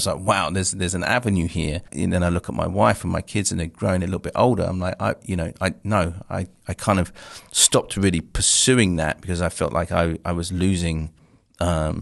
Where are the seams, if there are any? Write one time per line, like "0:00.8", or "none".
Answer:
0:01.9